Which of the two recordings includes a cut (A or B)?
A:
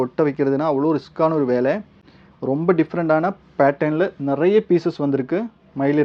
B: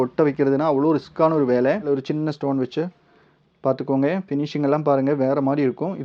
B